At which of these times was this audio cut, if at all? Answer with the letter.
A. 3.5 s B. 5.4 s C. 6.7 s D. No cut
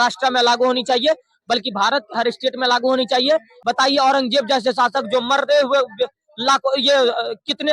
A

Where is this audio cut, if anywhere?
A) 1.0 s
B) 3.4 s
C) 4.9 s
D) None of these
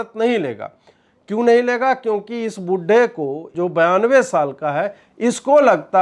B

